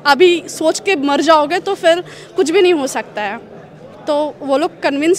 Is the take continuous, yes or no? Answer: yes